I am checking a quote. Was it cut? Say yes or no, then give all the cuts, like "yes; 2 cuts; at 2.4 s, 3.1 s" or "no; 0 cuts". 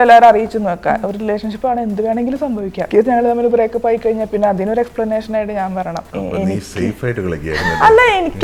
yes; 2 cuts; at 2.9 s, 6.0 s